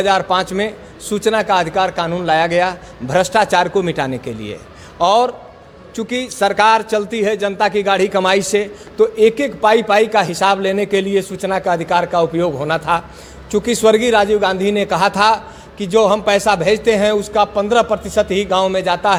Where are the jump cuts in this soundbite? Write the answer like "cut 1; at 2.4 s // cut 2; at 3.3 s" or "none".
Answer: none